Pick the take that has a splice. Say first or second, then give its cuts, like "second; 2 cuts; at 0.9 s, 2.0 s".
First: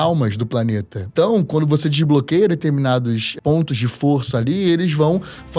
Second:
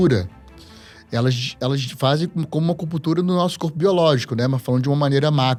first; 2 cuts; at 1.0 s, 3.3 s